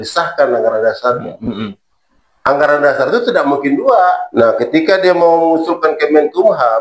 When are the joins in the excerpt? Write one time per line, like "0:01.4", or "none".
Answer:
0:04.2

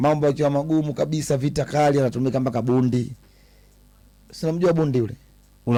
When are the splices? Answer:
none

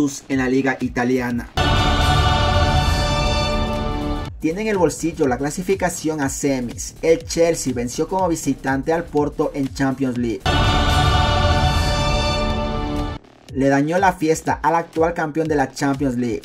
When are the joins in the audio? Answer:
0:01.5
0:10.4
0:13.2

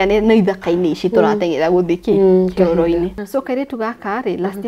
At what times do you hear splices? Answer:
0:03.2

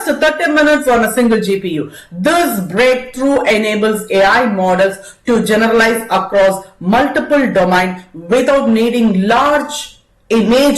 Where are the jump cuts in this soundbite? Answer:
none

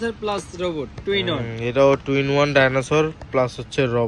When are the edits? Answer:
none

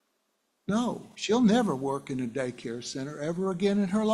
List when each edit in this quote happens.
none

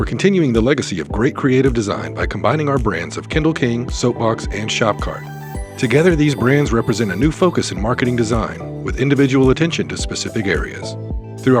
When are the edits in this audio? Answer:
none

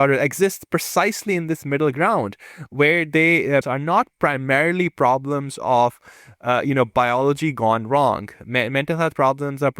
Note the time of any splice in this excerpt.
0:03.6

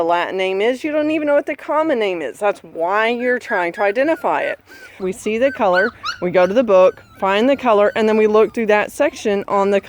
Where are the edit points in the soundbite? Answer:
0:05.0

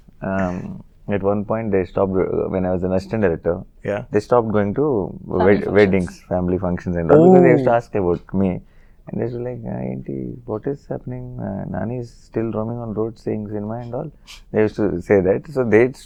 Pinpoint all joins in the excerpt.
none

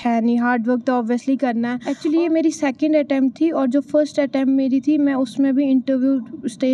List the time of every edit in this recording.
0:01.8

